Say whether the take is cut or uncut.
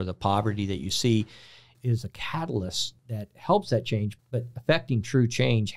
cut